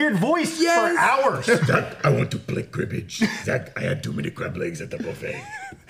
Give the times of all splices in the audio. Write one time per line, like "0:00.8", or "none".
0:01.6
0:03.4